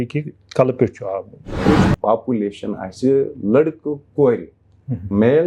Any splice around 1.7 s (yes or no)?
yes